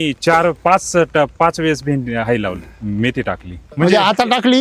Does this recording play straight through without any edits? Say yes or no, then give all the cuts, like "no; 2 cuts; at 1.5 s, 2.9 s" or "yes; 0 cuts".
no; 1 cut; at 3.7 s